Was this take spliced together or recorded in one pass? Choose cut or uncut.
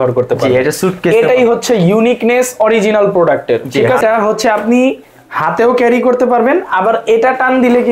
cut